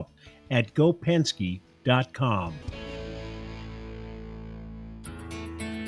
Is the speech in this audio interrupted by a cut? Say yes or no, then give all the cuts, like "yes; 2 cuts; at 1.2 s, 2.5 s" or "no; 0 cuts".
yes; 1 cut; at 5.0 s